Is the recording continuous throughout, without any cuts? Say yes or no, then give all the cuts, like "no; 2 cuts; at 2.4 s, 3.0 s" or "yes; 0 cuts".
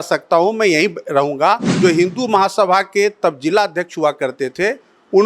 no; 1 cut; at 1.7 s